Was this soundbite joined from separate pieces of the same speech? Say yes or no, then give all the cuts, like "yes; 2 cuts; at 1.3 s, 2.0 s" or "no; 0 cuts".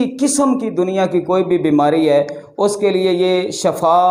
no; 0 cuts